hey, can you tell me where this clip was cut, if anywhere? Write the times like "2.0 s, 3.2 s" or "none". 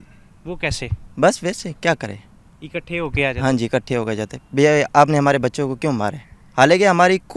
none

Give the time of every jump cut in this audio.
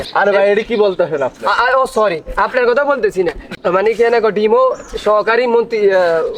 none

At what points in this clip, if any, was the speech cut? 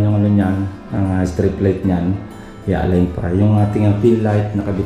none

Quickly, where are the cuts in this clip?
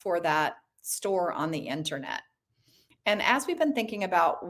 none

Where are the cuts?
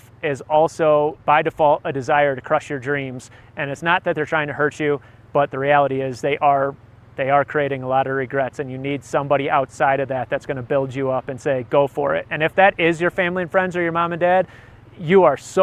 1.2 s

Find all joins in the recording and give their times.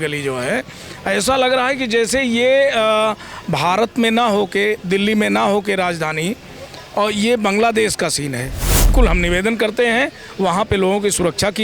8.9 s

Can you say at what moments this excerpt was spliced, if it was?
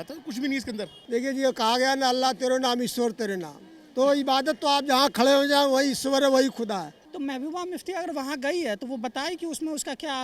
0.9 s, 6.9 s

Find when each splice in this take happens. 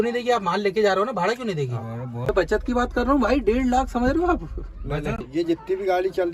2.3 s, 5.2 s

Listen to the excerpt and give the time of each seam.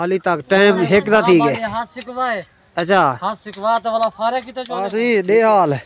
4.9 s

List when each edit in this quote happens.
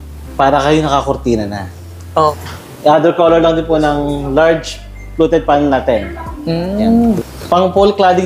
2.3 s, 7.2 s

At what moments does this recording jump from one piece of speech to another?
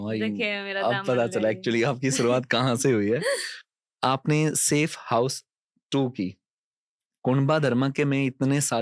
none

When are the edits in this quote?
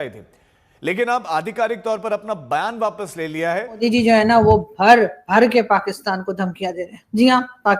3.8 s

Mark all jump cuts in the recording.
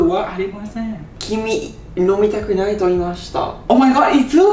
1.1 s, 3.5 s

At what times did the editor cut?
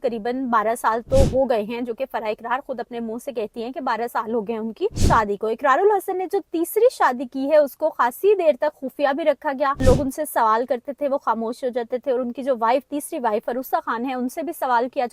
5.0 s, 9.8 s

